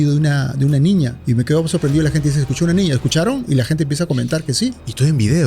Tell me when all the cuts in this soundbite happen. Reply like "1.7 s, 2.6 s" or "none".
1.2 s